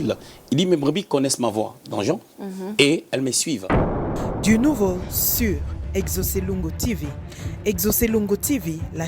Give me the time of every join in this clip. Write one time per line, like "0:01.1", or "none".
0:03.8